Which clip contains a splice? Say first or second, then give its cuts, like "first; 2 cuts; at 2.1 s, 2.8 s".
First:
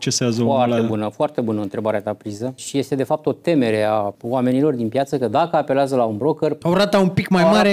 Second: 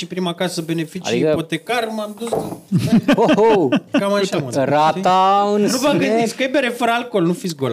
first; 3 cuts; at 2.6 s, 4.2 s, 6.6 s